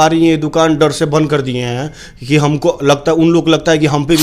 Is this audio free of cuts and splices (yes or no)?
yes